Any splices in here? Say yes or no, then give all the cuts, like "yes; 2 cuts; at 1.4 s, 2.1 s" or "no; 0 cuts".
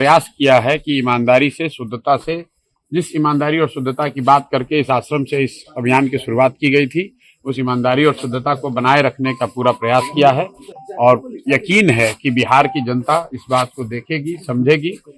no; 0 cuts